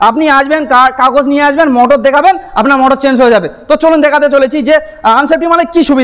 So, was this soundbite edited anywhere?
no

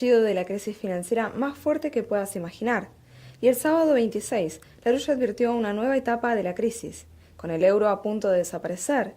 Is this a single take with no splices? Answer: no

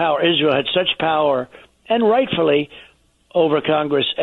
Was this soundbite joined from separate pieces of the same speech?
no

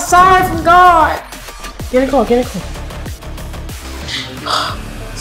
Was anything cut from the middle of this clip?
yes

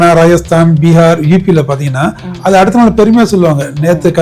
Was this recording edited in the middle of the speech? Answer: no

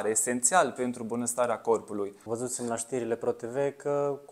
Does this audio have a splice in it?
yes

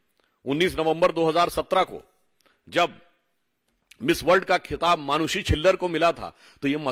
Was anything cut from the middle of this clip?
no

